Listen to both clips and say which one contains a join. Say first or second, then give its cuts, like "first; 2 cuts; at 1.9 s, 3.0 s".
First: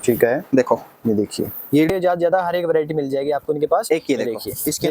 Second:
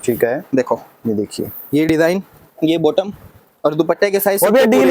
first; 1 cut; at 1.9 s